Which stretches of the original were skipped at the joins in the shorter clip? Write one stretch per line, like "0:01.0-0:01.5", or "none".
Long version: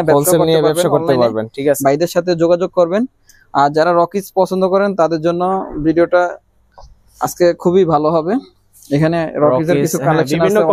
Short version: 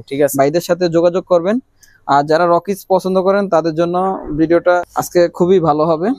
0:06.4-0:07.2